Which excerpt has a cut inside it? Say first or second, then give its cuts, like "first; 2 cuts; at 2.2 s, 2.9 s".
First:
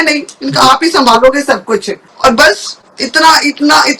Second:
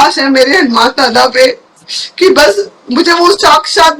first; 1 cut; at 2.0 s